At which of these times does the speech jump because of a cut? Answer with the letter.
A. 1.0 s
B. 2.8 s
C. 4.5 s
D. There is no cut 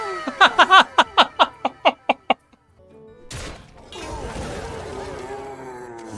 B